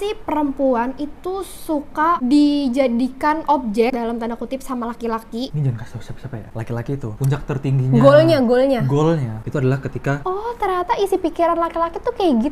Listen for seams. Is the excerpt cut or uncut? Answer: cut